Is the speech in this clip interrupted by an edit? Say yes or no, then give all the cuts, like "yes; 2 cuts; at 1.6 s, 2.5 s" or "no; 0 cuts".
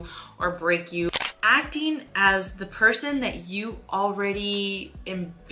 yes; 1 cut; at 1.3 s